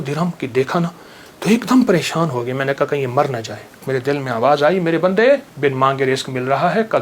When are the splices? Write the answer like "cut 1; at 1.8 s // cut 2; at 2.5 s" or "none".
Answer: cut 1; at 3.8 s // cut 2; at 5.5 s